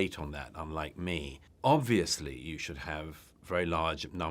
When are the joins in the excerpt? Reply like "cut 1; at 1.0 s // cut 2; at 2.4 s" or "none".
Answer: cut 1; at 1.4 s